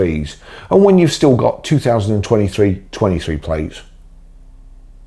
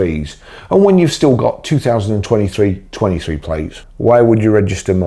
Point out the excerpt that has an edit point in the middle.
second; 1 cut; at 3.8 s

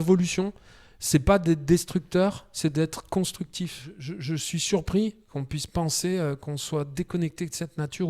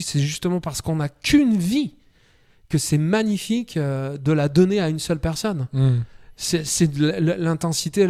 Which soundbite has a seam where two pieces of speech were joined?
first; 1 cut; at 4.1 s

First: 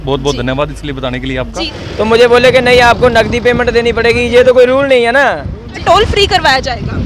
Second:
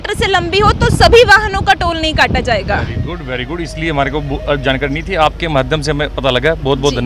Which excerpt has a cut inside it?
first; 2 cuts; at 1.8 s, 5.7 s

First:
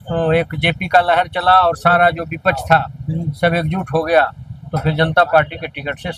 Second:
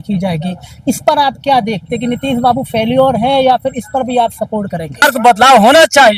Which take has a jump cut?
second; 1 cut; at 5.0 s

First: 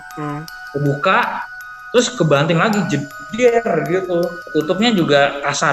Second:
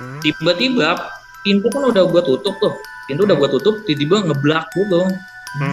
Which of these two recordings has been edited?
first; 1 cut; at 4.4 s

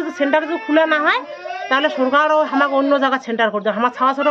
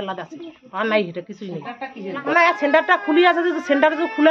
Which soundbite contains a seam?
second; 1 cut; at 2.2 s

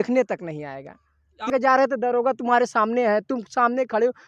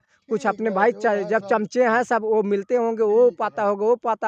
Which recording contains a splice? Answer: first; 1 cut; at 1.5 s

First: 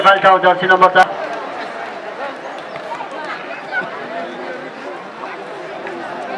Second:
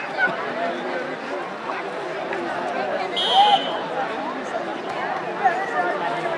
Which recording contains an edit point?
first; 1 cut; at 1.0 s

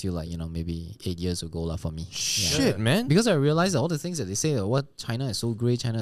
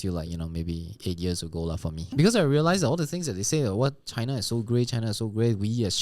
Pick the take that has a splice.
second; 1 cut; at 2.1 s

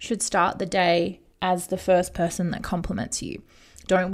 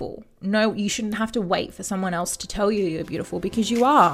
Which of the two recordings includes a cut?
first; 1 cut; at 1.2 s

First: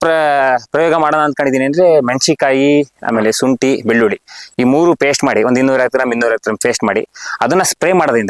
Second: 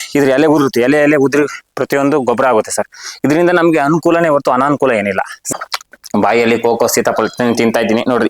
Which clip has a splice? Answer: second; 1 cut; at 5.4 s

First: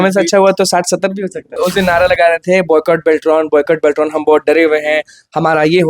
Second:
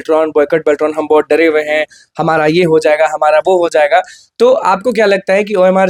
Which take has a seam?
first; 1 cut; at 1.5 s

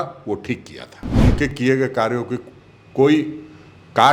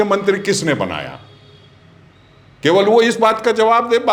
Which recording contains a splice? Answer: first; 1 cut; at 1.2 s

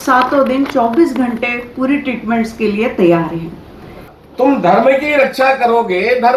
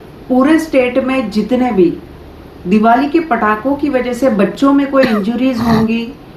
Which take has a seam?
first; 1 cut; at 4.1 s

